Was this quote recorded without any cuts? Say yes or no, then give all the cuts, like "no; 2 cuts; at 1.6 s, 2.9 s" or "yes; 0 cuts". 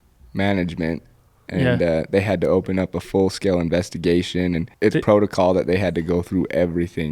no; 1 cut; at 4.7 s